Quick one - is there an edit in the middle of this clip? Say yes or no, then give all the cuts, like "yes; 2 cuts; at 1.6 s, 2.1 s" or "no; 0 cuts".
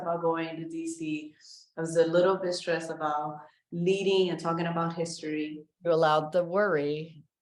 no; 0 cuts